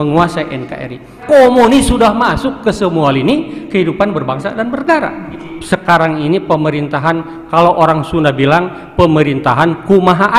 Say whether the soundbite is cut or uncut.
cut